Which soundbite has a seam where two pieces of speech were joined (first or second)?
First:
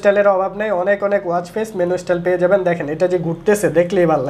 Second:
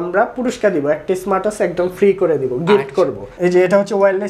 second